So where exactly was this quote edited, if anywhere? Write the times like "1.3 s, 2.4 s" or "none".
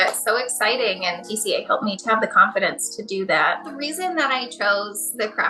1.8 s, 3.7 s